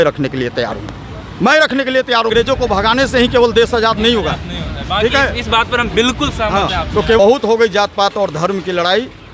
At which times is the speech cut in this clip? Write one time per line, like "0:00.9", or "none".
0:02.3
0:07.2

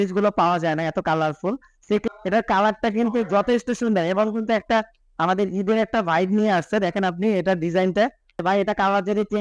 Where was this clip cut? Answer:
0:02.0
0:08.4

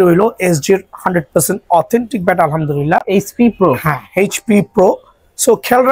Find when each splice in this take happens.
none

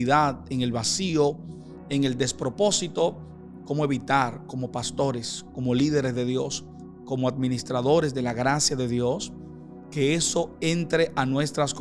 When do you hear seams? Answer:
none

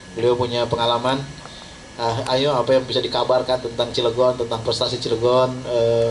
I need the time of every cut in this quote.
none

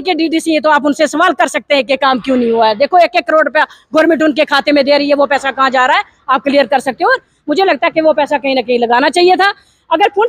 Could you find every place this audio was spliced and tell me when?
none

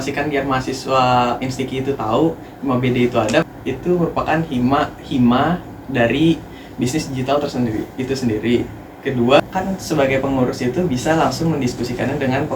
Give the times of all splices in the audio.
0:03.5
0:09.4

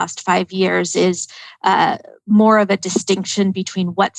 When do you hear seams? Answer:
none

